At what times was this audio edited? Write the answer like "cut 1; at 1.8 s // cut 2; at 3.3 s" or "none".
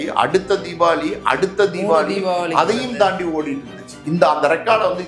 none